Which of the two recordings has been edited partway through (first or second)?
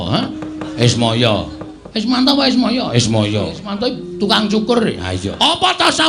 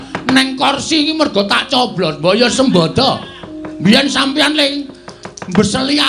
first